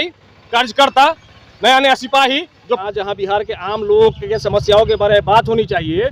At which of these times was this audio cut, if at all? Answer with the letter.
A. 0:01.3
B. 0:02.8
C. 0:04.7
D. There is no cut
B